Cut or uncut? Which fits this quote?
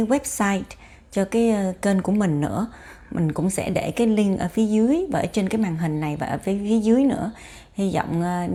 uncut